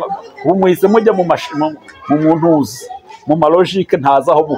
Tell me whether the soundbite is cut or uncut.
uncut